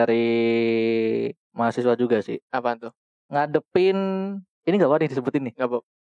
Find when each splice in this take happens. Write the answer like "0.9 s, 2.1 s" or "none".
none